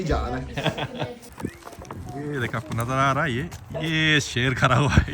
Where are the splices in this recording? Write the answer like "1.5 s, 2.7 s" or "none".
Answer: 1.2 s